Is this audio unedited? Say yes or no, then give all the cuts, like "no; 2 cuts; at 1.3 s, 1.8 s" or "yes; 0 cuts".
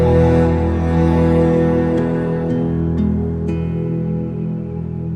yes; 0 cuts